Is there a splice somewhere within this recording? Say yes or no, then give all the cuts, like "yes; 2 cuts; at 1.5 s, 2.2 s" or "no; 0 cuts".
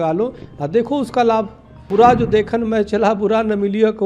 yes; 1 cut; at 1.9 s